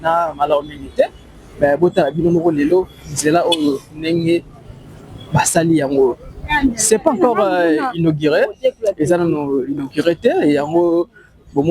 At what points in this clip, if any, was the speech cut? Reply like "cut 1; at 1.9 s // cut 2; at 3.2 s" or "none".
none